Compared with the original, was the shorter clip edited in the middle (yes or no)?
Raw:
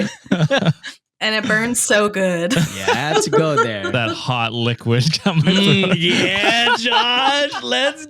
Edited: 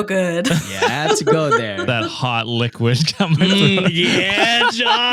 no